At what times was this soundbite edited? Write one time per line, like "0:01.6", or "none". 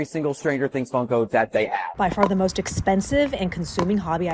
0:01.9